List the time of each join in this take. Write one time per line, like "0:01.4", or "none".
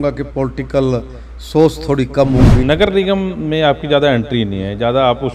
0:02.6